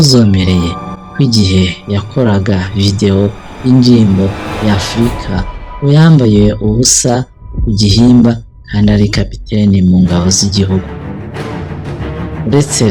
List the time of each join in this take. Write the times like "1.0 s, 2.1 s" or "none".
none